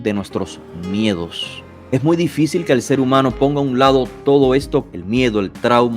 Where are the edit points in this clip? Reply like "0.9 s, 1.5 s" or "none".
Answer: 1.9 s, 4.9 s